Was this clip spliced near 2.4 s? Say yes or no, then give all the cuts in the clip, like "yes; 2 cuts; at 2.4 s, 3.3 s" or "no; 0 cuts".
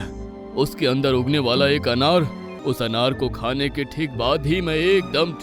yes; 1 cut; at 2.4 s